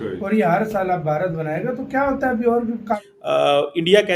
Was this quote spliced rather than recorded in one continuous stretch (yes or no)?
yes